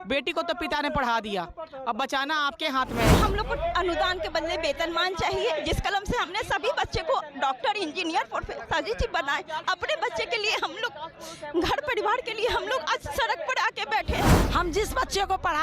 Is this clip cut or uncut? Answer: cut